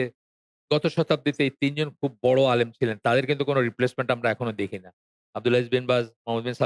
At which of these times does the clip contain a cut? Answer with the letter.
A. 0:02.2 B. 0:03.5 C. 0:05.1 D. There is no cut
D